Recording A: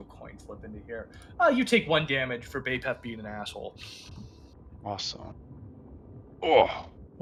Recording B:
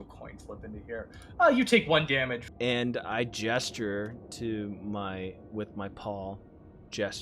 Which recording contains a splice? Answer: B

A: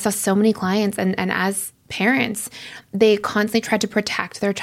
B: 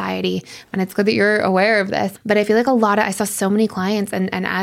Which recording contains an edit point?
B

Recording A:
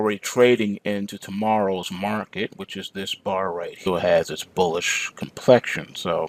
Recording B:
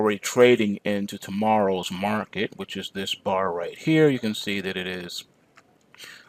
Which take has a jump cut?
B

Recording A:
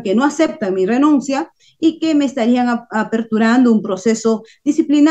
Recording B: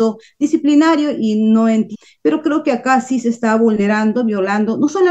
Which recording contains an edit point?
B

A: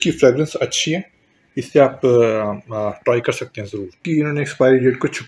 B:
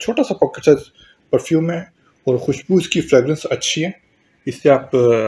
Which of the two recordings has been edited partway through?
A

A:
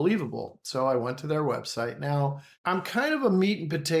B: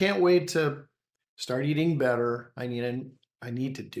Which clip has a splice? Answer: A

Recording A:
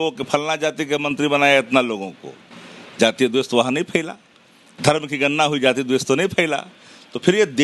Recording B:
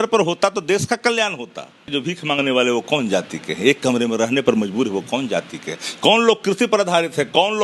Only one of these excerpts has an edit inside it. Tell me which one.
B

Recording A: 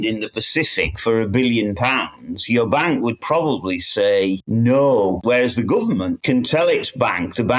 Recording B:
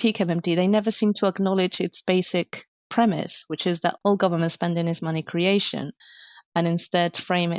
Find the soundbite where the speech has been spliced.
A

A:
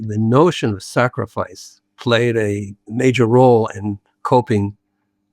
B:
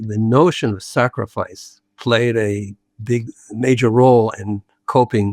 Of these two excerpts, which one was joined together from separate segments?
A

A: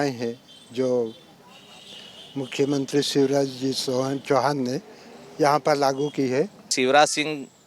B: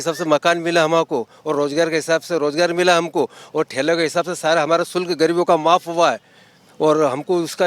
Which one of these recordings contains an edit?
A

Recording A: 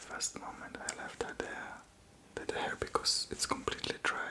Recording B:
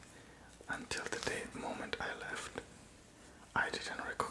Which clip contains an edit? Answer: A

